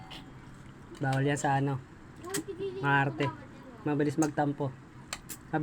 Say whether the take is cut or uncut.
uncut